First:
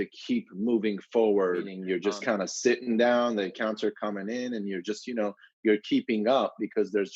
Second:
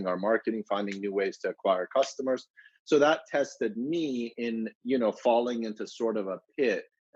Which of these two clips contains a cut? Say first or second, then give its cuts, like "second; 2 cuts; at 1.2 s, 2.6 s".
first; 1 cut; at 1.7 s